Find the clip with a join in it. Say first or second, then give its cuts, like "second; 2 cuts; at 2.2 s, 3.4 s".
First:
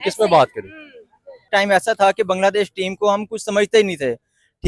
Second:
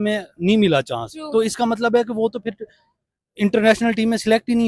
first; 1 cut; at 1.4 s